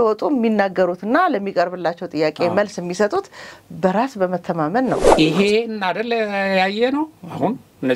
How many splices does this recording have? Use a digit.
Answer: 1